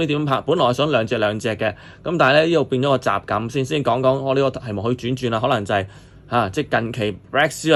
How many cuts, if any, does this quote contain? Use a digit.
0